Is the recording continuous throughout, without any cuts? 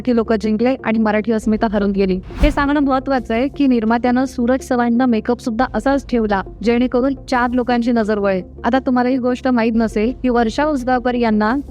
yes; 0 cuts

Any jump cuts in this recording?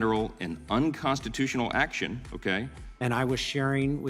yes; 1 cut; at 2.9 s

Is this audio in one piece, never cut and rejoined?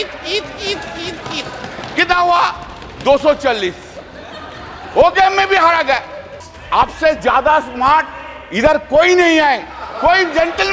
no; 1 cut; at 6.4 s

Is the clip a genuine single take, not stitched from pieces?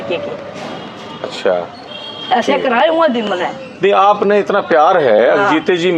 yes; 0 cuts

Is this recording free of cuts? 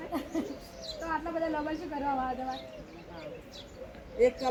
yes; 0 cuts

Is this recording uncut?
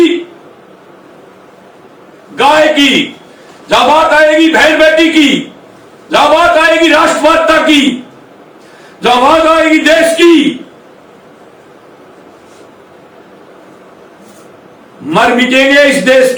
yes; 0 cuts

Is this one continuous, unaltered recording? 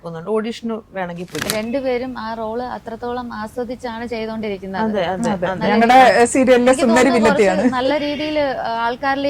no; 1 cut; at 1.5 s

